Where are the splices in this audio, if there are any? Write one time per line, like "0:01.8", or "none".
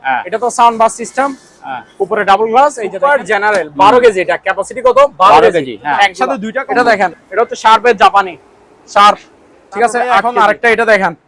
0:02.9
0:06.5
0:10.2